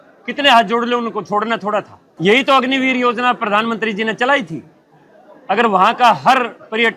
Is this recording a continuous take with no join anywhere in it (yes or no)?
no